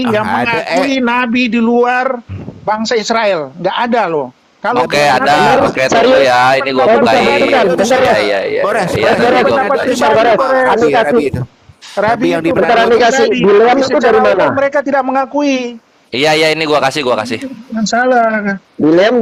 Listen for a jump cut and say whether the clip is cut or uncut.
uncut